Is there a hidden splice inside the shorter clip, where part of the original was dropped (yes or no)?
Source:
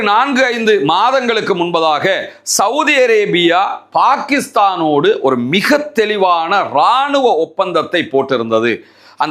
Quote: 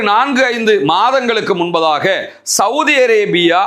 no